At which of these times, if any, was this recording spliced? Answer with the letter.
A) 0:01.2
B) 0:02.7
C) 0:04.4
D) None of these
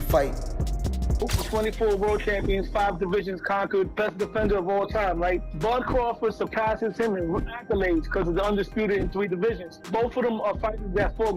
A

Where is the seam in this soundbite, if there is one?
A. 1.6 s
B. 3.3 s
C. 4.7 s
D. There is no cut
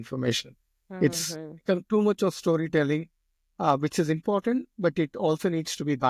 D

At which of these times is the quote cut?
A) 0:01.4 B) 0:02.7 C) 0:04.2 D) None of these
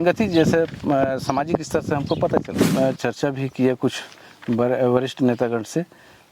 B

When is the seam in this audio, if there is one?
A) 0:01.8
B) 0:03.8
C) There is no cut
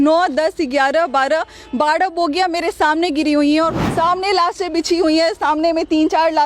B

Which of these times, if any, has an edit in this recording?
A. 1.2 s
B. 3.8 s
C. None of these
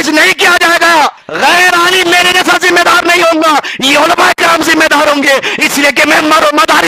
A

